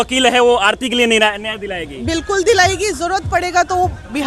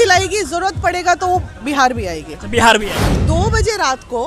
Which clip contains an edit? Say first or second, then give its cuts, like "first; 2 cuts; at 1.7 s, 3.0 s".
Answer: second; 1 cut; at 3.2 s